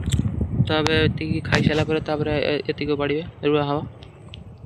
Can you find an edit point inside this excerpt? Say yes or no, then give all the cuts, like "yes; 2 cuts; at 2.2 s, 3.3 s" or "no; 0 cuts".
no; 0 cuts